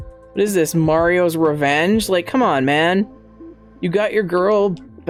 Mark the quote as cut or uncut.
uncut